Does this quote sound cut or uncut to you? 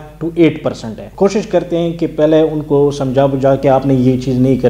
cut